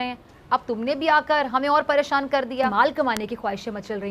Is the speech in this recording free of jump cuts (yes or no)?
yes